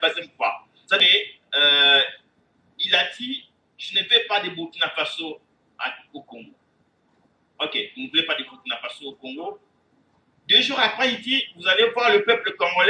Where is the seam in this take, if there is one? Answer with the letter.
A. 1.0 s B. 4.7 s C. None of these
A